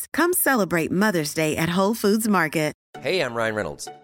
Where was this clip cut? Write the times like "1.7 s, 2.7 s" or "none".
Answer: 2.9 s